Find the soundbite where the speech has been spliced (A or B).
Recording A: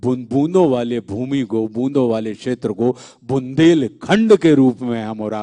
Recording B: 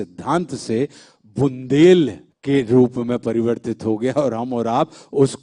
B